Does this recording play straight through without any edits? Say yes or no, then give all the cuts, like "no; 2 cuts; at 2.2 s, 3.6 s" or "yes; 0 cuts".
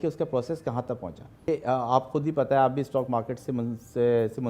no; 1 cut; at 1.5 s